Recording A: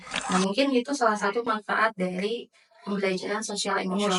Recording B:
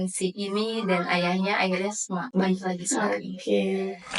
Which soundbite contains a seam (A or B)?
B